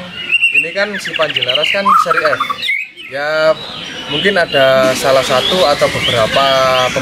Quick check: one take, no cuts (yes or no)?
yes